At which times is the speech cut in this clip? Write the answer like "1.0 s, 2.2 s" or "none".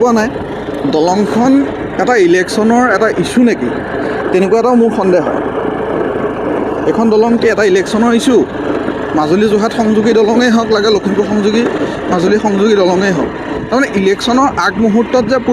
none

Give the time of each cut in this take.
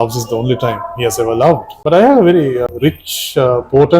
1.7 s, 2.7 s

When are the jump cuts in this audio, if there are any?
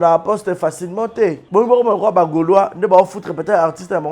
1.4 s

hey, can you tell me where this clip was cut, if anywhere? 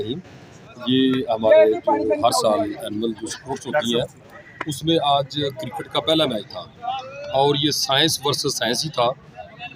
none

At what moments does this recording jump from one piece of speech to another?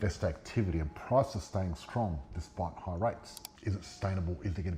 3.5 s

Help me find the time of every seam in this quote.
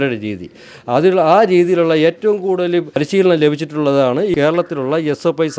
2.9 s, 4.3 s

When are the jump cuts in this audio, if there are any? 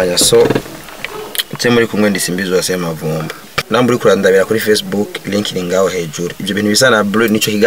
3.6 s

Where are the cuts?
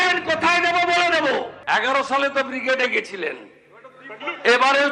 1.6 s

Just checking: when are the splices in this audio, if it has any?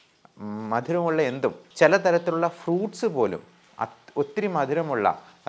1.6 s

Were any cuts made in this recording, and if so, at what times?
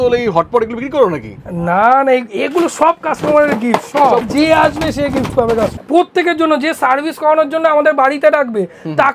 4.3 s, 5.7 s

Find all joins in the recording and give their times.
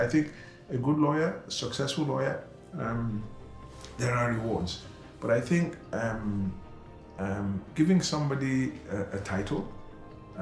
none

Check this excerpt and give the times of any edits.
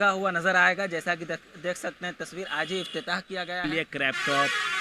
3.6 s

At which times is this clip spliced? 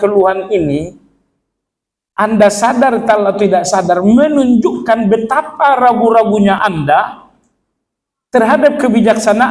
6.6 s

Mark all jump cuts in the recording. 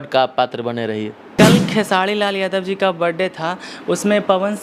1.3 s

